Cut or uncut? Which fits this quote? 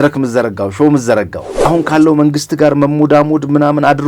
cut